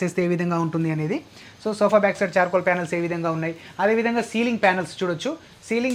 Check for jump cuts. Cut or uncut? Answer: uncut